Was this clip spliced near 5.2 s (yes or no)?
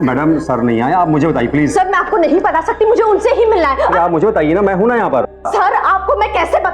yes